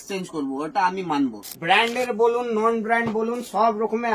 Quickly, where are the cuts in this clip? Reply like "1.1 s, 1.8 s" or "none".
1.4 s